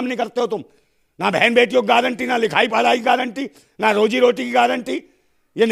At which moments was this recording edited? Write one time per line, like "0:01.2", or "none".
none